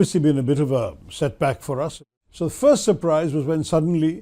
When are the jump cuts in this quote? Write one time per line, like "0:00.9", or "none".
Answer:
0:01.9

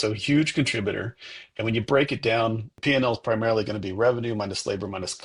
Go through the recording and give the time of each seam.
0:02.7

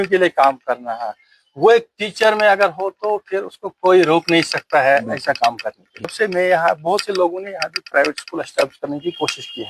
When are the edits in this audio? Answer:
0:06.1

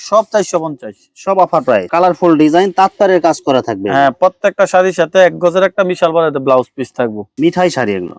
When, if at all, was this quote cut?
0:01.9
0:07.2

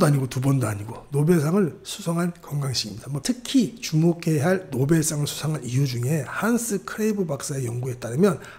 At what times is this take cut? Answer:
0:03.2

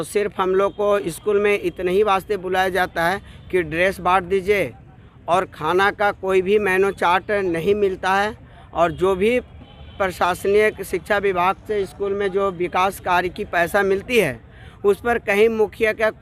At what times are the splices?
none

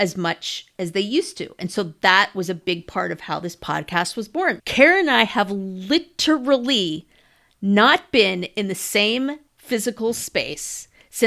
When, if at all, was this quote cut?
0:04.6

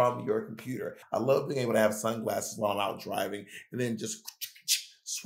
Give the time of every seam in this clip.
0:01.0

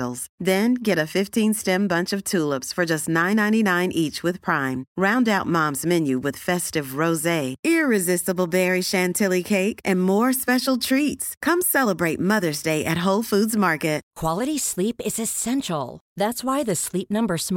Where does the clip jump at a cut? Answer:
0:14.1

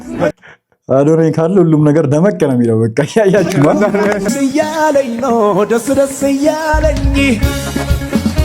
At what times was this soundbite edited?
0:04.3

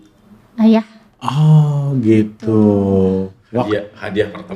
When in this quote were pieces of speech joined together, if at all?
none

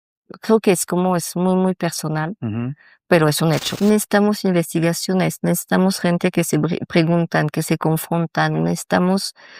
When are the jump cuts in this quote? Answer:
0:03.7

